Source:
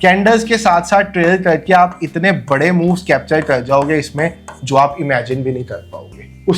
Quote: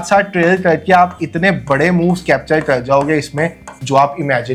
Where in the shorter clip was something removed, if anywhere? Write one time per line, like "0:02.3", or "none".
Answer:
none